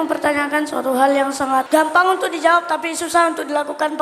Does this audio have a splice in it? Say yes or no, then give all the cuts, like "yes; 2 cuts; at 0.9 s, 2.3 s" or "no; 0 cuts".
yes; 1 cut; at 1.7 s